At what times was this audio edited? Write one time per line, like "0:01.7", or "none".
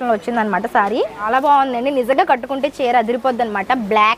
0:01.2